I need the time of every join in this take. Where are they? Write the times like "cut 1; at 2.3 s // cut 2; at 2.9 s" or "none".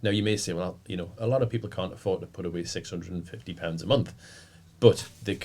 none